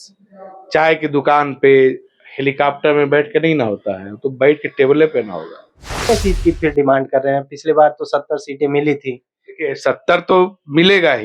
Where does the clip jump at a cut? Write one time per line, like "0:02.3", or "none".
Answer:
0:06.1